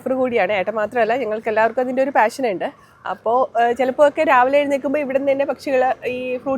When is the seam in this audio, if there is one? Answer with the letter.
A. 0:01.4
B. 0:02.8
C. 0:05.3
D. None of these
D